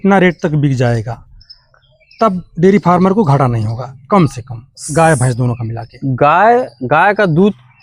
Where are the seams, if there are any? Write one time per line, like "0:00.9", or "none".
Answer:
none